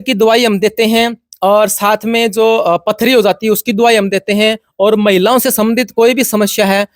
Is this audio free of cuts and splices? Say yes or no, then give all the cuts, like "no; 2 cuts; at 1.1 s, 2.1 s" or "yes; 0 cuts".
yes; 0 cuts